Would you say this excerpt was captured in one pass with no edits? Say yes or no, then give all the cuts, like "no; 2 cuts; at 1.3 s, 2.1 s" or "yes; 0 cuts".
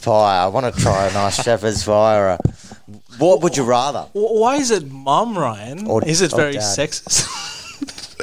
yes; 0 cuts